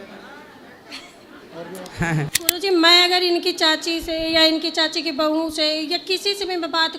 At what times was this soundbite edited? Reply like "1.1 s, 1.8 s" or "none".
2.3 s